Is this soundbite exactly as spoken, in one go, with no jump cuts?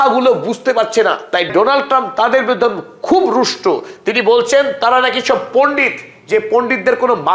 yes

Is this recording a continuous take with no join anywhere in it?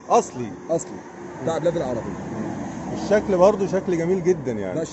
yes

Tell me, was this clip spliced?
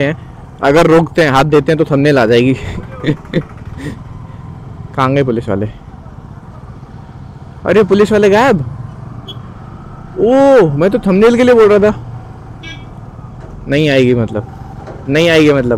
no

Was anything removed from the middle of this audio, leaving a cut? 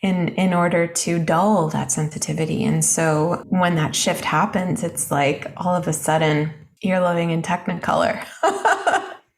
yes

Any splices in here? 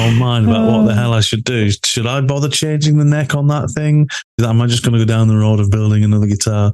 yes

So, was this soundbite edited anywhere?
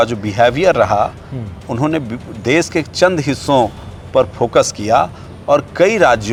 no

